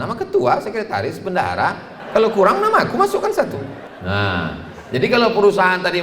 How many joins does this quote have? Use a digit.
2